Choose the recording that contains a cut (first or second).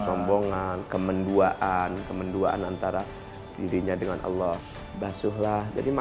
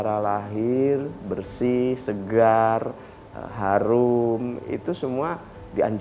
first